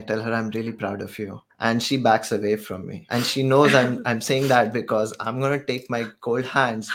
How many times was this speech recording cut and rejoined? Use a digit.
2